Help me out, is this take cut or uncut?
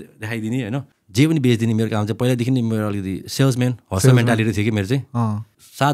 cut